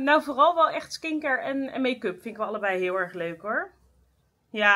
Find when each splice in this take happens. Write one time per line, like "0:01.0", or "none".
none